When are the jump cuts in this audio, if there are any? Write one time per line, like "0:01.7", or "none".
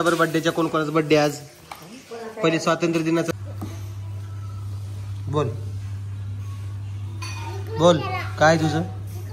0:03.3

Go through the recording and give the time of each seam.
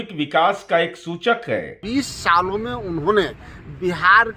0:01.8

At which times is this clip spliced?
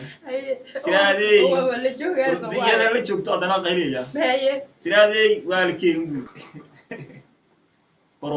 0:06.2

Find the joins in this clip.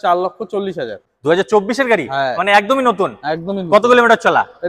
0:01.0

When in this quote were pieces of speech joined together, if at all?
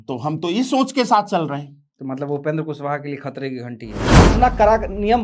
0:04.1

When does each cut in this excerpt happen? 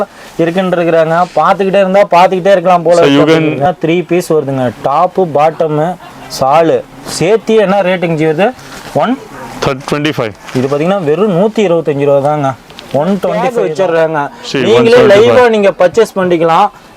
0:03.6
0:13.5

